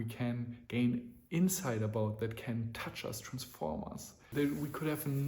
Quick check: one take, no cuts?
no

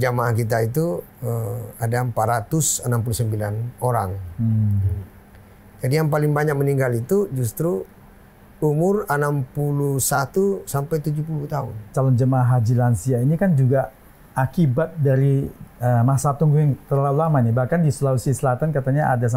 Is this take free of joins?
no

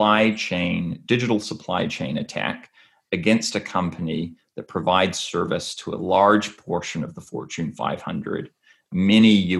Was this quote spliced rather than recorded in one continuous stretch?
no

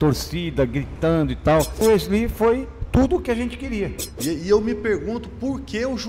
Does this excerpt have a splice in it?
yes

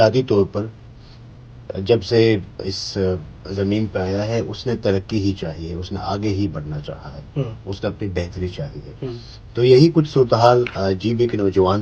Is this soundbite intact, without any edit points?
yes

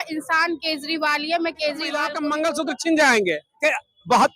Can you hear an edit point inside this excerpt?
yes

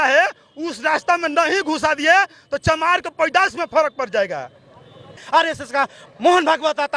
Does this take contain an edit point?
yes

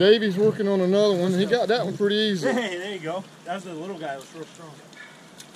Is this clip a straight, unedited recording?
yes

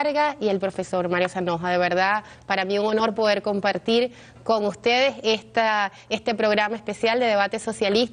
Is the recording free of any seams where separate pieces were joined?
yes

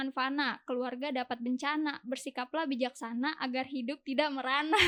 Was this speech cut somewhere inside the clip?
no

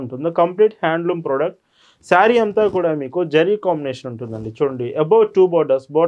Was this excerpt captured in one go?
yes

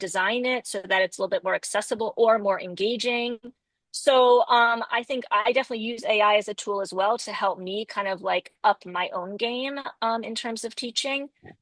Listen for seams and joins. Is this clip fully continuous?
yes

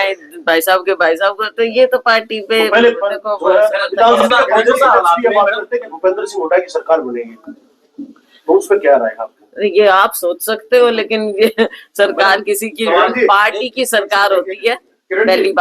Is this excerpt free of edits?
no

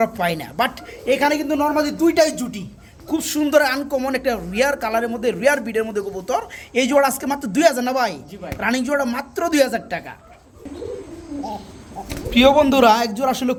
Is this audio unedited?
yes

